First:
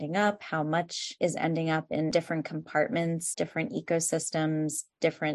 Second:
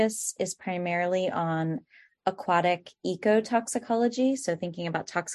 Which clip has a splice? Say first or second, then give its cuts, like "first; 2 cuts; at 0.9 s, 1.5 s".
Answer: first; 3 cuts; at 1.1 s, 2.1 s, 3.3 s